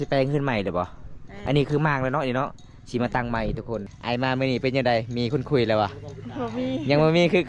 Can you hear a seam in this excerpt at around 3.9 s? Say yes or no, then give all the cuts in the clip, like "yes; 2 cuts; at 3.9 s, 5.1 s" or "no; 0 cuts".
yes; 1 cut; at 3.9 s